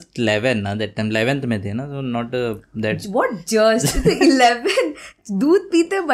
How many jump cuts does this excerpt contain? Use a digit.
0